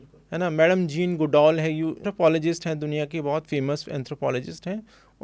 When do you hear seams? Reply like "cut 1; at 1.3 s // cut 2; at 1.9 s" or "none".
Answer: cut 1; at 2.0 s